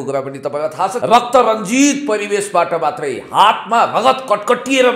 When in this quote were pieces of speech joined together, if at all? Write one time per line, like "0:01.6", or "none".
0:01.0